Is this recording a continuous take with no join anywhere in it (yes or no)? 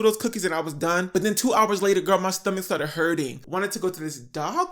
no